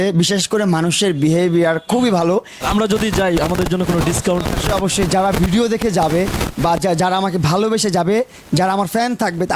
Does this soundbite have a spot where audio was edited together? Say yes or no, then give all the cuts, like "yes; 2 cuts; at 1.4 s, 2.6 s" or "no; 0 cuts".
yes; 1 cut; at 2.6 s